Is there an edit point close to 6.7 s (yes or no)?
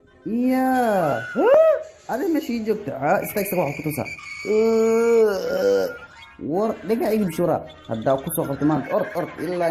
no